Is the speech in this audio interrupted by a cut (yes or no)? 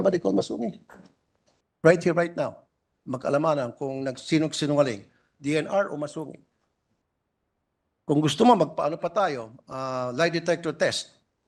no